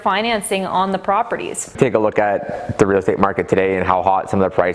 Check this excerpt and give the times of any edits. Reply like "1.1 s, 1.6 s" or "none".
1.8 s